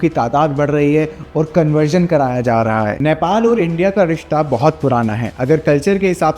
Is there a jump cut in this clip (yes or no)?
yes